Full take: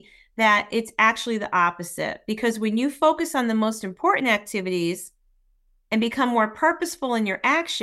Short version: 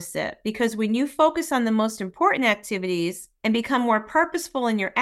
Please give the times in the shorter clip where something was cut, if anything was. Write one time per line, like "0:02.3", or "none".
0:03.3